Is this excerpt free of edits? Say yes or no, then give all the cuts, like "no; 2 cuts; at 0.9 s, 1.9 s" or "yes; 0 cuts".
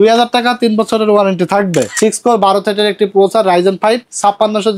no; 1 cut; at 1.9 s